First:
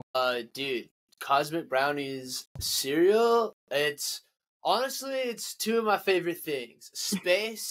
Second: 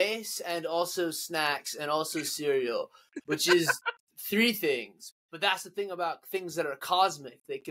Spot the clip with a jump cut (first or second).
second